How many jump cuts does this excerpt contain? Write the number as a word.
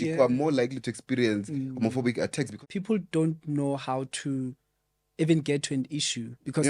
one